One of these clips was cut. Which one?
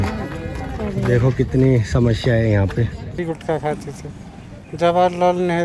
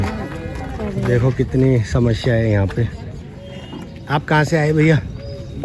first; 1 cut; at 3.0 s

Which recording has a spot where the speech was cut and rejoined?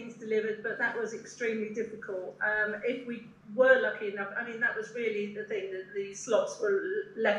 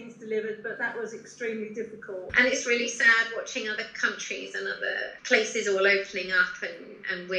second; 2 cuts; at 2.3 s, 5.2 s

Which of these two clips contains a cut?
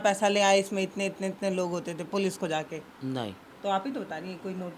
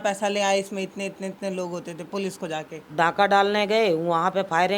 second; 1 cut; at 2.8 s

